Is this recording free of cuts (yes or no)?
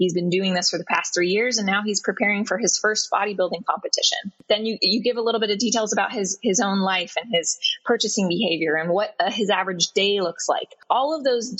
no